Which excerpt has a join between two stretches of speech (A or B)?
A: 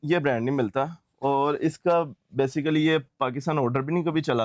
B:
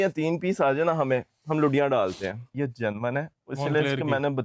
B